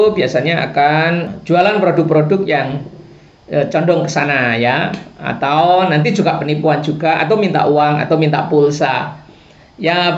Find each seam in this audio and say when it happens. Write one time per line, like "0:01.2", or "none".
0:01.3